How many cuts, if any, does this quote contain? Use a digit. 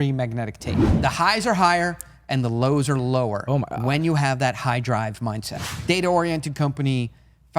2